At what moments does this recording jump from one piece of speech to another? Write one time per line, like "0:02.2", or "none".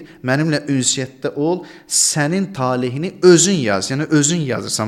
none